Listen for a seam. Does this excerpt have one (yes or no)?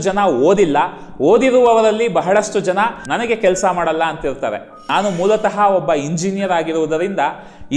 yes